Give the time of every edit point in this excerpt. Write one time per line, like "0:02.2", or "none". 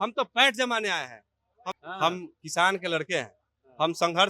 0:01.7